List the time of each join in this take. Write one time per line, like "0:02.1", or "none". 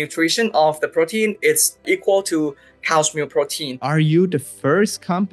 0:01.8
0:03.8